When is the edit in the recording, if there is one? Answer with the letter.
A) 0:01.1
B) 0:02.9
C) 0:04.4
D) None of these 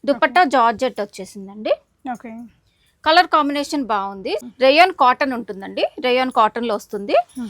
C